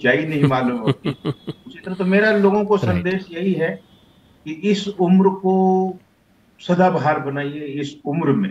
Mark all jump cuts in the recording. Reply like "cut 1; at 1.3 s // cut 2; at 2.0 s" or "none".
none